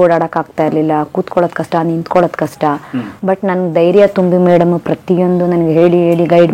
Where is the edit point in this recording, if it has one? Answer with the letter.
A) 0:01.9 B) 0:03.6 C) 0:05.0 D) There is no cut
D